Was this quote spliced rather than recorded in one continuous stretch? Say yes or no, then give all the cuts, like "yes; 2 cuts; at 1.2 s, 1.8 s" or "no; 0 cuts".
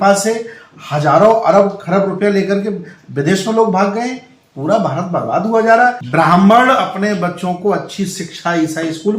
yes; 1 cut; at 6.0 s